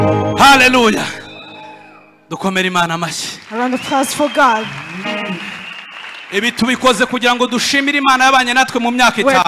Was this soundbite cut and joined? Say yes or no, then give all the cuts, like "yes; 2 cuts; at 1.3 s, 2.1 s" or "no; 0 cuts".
no; 0 cuts